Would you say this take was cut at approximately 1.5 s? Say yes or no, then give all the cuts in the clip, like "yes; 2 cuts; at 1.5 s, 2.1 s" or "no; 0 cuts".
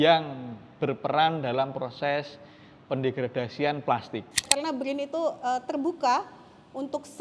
no; 1 cut; at 4.5 s